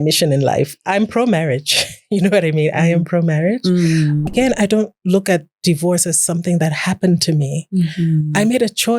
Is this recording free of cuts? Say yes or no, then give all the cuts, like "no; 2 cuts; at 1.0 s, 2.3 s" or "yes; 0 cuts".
no; 1 cut; at 4.2 s